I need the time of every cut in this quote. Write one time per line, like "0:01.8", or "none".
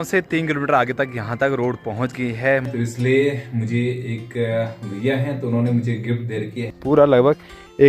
0:02.7
0:06.7